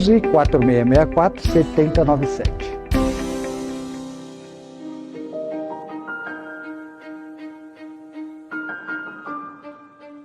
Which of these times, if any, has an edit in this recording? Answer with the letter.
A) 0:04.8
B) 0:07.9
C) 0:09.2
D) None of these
A